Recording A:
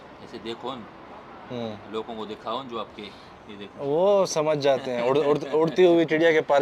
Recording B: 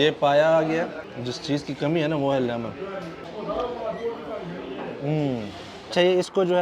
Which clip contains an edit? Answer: B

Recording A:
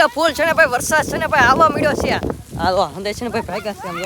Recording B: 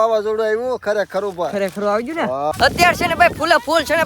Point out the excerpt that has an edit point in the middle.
B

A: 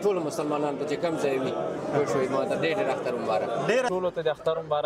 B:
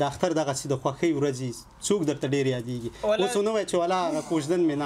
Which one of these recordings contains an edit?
A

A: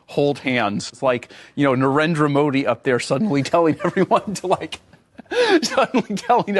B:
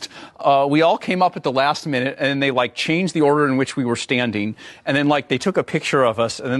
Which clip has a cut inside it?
A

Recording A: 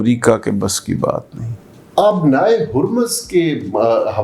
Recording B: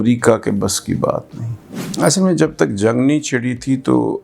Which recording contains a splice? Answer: B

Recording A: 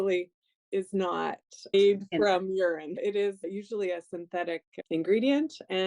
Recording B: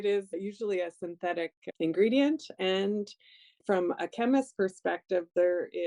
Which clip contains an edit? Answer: A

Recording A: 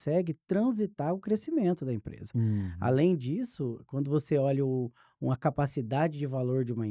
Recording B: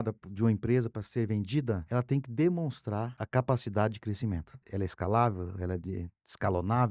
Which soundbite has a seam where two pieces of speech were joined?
B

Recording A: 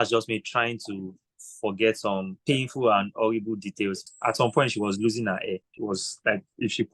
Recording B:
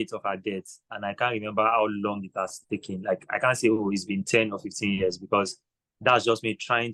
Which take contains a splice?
A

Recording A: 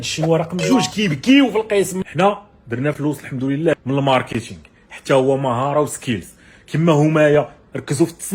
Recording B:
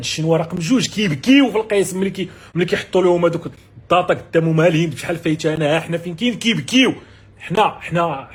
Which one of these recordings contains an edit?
A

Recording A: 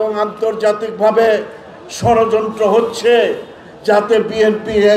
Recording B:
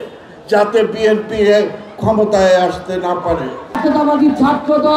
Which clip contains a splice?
B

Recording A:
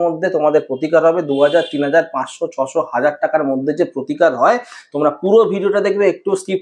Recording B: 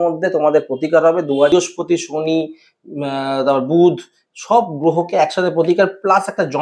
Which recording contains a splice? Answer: B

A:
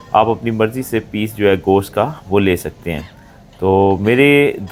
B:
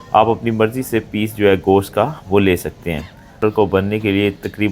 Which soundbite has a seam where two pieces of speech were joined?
B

